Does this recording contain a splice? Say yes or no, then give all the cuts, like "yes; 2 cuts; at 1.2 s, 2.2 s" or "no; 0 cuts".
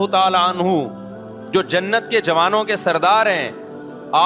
no; 0 cuts